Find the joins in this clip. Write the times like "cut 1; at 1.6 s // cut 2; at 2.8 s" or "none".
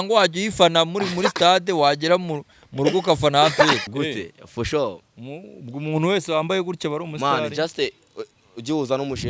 cut 1; at 3.8 s